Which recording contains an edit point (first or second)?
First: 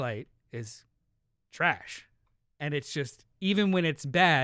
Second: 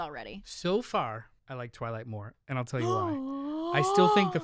second